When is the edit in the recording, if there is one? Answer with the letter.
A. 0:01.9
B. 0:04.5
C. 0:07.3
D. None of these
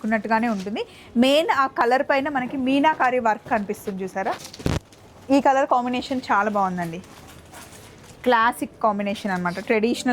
B